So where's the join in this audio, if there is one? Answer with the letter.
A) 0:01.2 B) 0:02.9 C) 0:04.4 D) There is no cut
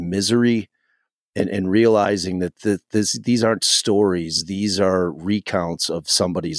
D